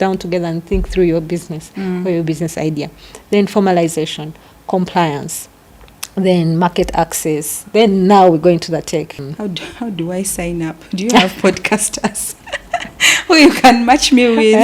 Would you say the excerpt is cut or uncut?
cut